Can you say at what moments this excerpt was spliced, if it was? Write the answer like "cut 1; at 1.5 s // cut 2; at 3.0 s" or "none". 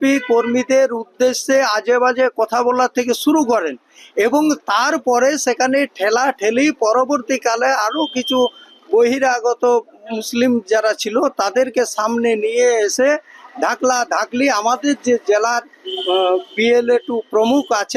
none